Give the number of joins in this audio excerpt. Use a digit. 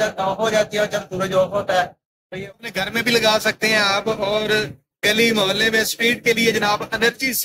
1